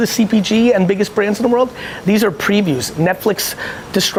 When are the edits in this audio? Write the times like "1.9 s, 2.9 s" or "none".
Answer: none